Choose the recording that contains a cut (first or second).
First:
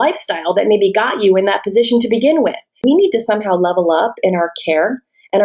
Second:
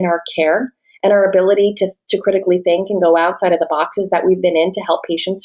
first